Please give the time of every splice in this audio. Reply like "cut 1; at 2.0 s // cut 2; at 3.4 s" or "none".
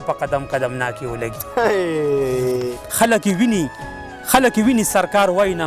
cut 1; at 2.7 s